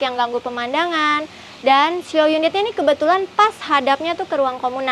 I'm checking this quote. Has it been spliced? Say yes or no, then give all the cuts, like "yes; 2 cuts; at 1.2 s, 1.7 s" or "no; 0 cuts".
no; 0 cuts